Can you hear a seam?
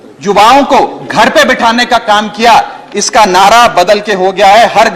no; 0 cuts

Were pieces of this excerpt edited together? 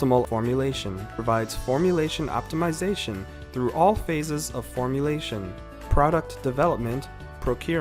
yes; 1 cut; at 1.0 s

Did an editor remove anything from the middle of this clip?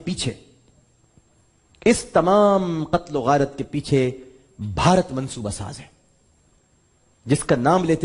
no; 0 cuts

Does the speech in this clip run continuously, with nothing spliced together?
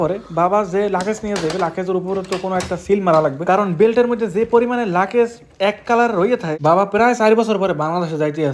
no; 1 cut; at 6.5 s

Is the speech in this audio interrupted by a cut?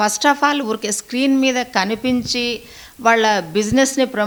no; 0 cuts

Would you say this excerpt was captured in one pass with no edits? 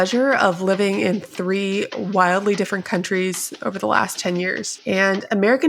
yes; 0 cuts

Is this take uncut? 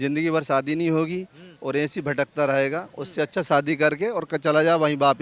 yes; 0 cuts

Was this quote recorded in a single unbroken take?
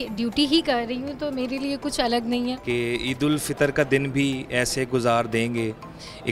no; 1 cut; at 2.6 s

